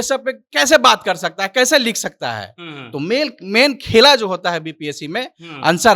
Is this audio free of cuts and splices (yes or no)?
yes